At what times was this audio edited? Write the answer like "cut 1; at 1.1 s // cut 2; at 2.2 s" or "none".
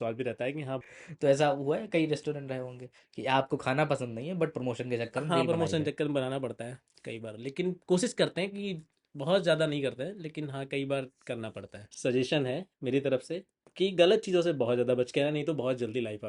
cut 1; at 1.0 s // cut 2; at 11.8 s